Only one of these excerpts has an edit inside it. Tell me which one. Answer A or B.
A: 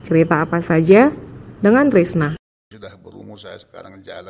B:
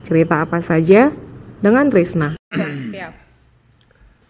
A